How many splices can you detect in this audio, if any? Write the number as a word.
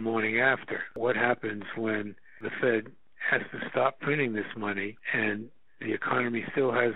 three